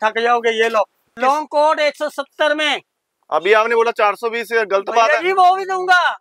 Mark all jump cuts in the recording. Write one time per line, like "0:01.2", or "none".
0:01.1